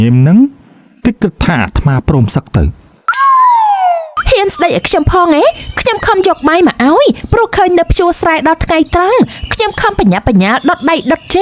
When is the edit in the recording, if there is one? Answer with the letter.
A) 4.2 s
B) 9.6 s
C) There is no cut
A